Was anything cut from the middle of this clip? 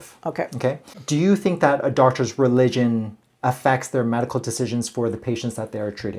yes; 1 cut; at 0.9 s

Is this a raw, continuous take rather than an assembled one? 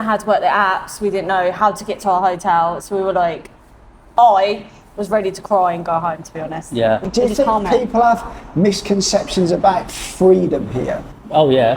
no; 1 cut; at 7.1 s

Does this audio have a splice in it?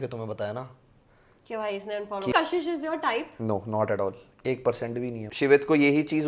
yes; 2 cuts; at 2.3 s, 5.3 s

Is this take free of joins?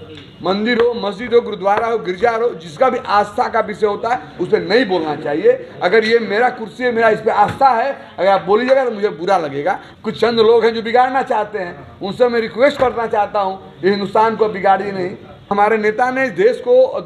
no; 2 cuts; at 9.9 s, 15.5 s

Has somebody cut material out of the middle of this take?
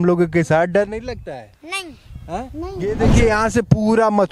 yes; 1 cut; at 2.9 s

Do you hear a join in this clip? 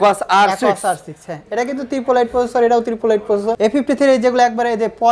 yes; 1 cut; at 3.6 s

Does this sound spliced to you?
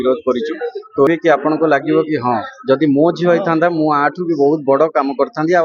yes; 1 cut; at 1.1 s

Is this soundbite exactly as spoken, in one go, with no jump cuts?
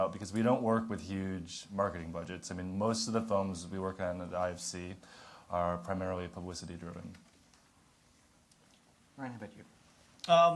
no; 1 cut; at 7.1 s

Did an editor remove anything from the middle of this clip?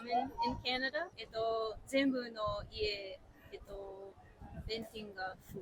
no; 0 cuts

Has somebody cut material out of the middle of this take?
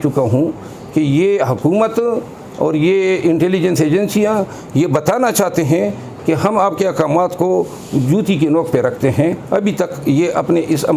no; 0 cuts

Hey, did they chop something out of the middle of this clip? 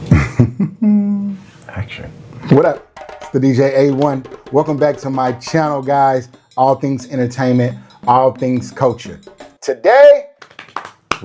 no; 0 cuts

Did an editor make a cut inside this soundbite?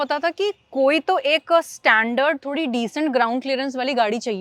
no; 0 cuts

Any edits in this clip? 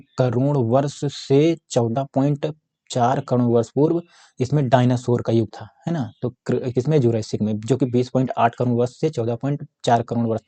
no; 0 cuts

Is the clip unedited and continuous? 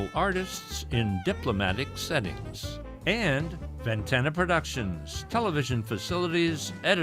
yes; 0 cuts

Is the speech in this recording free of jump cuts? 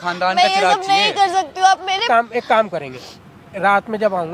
no; 1 cut; at 2.0 s

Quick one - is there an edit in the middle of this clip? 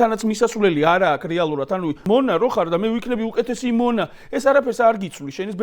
yes; 1 cut; at 2.0 s

